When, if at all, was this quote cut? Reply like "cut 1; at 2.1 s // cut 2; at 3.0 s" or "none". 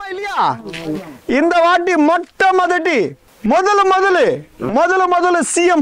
cut 1; at 3.2 s